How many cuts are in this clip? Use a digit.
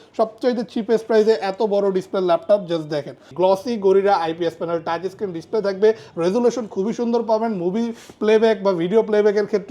1